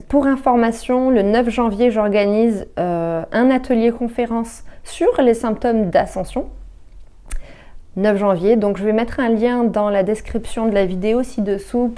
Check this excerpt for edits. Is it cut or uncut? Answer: uncut